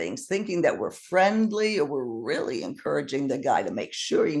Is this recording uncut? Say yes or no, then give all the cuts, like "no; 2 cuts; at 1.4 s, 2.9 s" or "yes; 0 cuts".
yes; 0 cuts